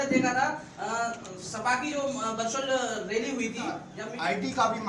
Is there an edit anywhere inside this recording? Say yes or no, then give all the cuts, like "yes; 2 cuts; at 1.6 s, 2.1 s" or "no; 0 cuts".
yes; 1 cut; at 4.0 s